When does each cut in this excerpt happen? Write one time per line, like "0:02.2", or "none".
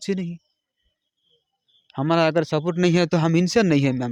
none